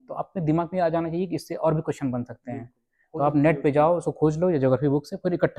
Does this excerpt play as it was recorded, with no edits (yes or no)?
yes